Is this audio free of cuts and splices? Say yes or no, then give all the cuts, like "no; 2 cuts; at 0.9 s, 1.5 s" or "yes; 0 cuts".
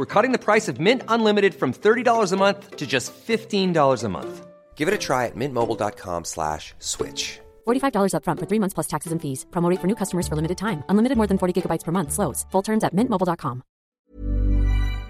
no; 1 cut; at 13.9 s